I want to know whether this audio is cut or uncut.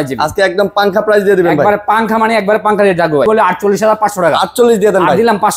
cut